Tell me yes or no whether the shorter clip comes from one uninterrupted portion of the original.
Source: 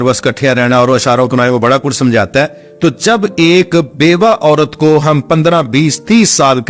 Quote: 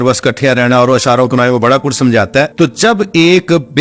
no